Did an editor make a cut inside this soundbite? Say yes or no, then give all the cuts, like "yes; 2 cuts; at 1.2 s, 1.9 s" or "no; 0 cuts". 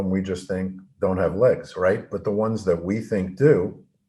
no; 0 cuts